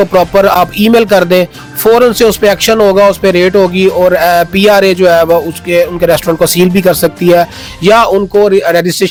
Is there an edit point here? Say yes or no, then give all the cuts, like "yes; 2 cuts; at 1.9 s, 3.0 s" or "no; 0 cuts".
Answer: no; 0 cuts